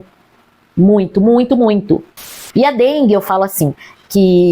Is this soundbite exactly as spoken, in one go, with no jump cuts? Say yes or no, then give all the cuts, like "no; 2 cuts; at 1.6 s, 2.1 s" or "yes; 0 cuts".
no; 1 cut; at 2.2 s